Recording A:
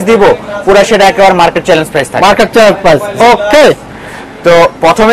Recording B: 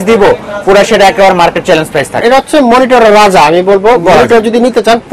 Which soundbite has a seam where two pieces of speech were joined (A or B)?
B